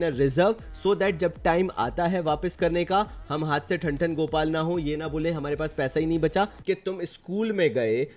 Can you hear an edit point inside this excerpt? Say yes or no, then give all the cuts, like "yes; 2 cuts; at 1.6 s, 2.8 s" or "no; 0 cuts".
yes; 1 cut; at 6.6 s